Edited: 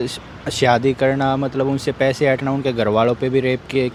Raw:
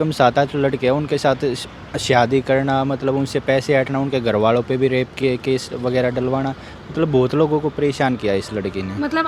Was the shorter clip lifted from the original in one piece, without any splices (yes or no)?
yes